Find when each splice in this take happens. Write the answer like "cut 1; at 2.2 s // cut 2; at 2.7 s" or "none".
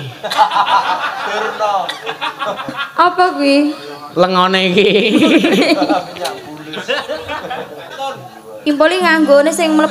cut 1; at 7.9 s